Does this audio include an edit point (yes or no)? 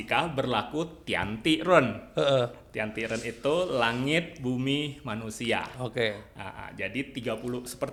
no